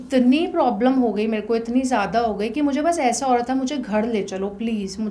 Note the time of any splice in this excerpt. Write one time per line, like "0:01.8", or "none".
none